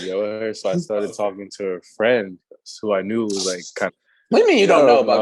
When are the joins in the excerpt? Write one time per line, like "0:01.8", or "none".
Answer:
0:03.9